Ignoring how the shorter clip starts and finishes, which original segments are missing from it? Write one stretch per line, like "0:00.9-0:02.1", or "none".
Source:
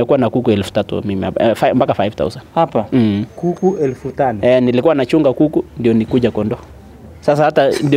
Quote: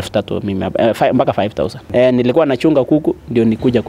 0:02.5-0:04.4